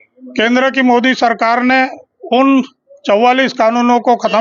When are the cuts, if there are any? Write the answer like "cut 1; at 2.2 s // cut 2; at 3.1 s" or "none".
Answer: none